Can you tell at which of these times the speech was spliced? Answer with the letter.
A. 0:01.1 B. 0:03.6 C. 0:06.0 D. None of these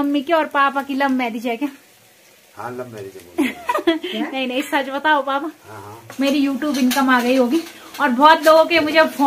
C